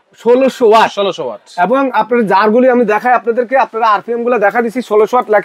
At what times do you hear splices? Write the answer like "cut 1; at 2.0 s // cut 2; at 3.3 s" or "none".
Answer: none